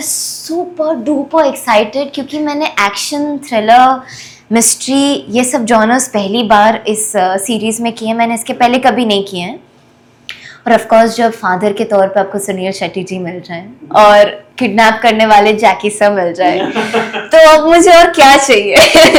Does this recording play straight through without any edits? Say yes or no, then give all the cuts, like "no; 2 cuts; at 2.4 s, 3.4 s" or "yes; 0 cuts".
yes; 0 cuts